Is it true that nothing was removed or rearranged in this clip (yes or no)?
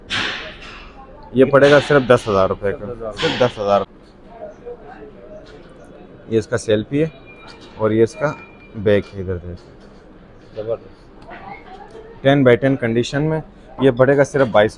no